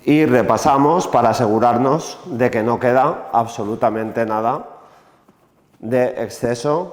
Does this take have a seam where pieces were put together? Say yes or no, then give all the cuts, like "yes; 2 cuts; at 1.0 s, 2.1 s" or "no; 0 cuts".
no; 0 cuts